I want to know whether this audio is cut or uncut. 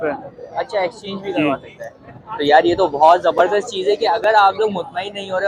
uncut